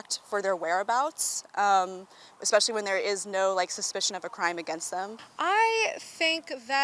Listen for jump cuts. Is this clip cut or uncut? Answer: cut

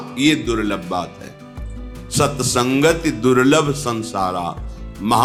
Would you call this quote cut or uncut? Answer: uncut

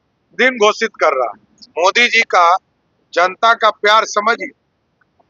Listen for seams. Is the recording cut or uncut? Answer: cut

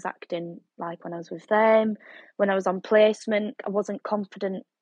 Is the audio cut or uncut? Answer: cut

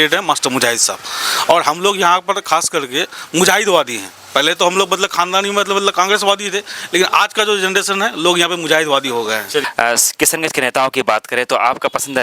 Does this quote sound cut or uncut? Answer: cut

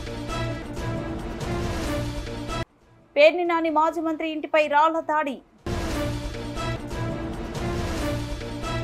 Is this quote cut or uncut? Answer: cut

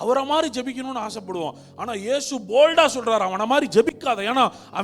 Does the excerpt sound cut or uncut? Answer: uncut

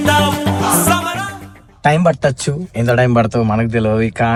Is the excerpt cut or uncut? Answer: uncut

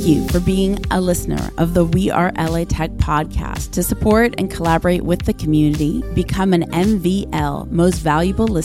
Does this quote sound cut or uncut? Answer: uncut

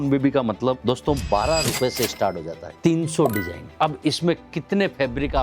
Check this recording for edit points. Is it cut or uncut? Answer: cut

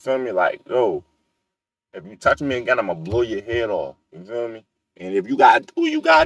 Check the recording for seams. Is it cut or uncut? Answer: uncut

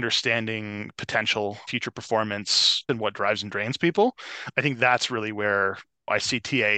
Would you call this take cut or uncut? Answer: cut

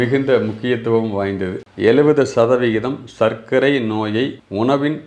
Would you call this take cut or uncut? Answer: cut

